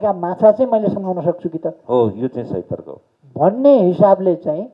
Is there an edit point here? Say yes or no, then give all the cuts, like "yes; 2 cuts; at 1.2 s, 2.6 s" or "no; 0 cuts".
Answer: no; 0 cuts